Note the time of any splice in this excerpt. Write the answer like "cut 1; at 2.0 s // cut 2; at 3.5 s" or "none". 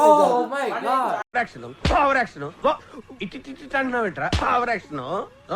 cut 1; at 1.3 s